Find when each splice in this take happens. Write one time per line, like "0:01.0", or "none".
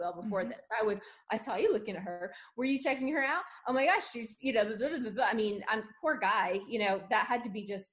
none

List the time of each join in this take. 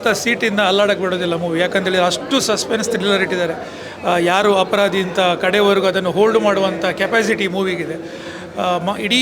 none

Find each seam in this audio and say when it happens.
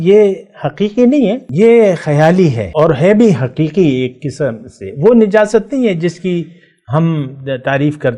0:01.4
0:02.6

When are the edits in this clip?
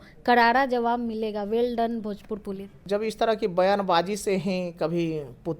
0:02.7

